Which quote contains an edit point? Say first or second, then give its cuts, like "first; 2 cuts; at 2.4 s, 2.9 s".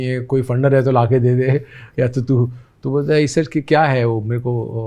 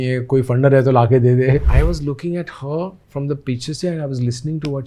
second; 1 cut; at 1.7 s